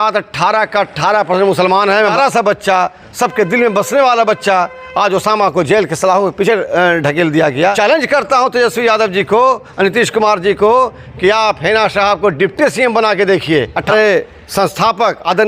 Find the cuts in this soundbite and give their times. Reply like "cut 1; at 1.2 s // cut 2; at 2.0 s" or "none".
cut 1; at 2.1 s // cut 2; at 7.8 s // cut 3; at 13.9 s